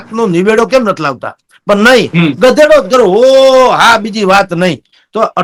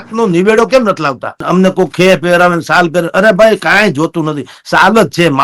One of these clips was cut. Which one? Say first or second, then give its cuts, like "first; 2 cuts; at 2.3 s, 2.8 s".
second; 1 cut; at 1.4 s